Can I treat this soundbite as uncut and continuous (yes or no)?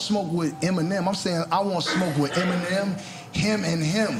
yes